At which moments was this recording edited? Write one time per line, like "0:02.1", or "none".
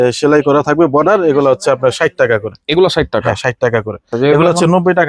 0:04.1